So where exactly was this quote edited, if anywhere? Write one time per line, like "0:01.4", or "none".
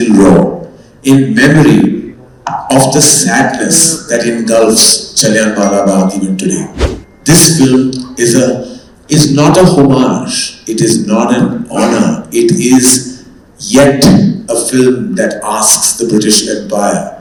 none